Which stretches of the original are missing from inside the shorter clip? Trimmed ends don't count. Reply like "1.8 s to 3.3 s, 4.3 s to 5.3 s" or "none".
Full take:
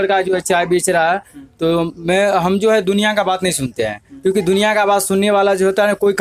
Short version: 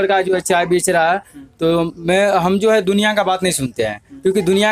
none